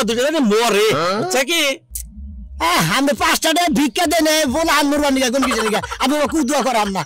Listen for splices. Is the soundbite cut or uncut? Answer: uncut